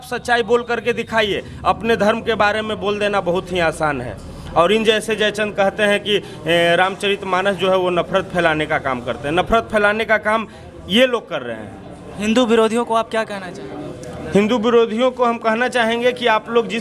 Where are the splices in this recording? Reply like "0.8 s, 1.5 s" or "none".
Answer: none

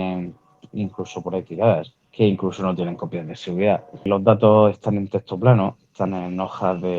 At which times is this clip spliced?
2.0 s, 4.1 s

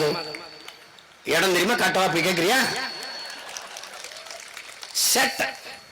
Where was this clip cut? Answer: none

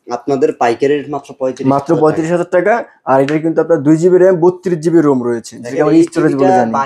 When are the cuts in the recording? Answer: none

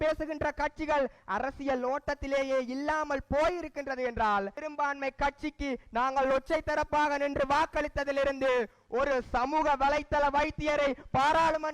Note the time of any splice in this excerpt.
4.6 s

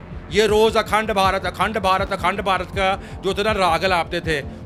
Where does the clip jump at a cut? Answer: none

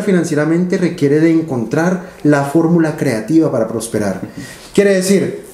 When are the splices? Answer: none

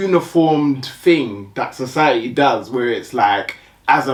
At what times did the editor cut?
none

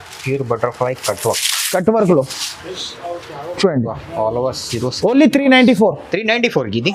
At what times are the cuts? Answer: none

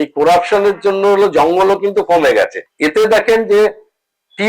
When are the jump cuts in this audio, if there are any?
2.6 s

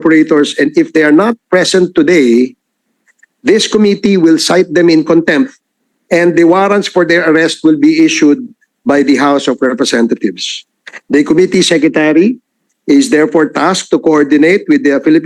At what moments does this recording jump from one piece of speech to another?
none

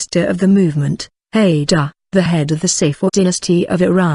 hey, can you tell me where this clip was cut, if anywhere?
none

